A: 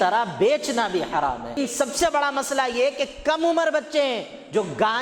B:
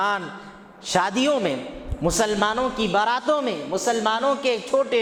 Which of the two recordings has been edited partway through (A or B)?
A